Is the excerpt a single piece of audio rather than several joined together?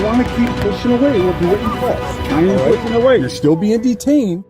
yes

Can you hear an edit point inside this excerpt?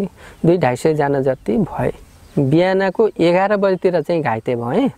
yes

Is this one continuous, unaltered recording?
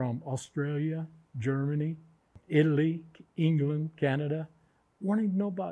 no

